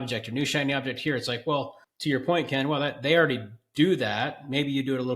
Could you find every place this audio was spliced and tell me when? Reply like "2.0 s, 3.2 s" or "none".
1.8 s